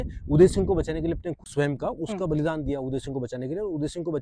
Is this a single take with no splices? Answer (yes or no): no